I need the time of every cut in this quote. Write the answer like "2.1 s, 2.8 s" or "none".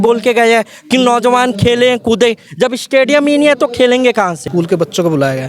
4.4 s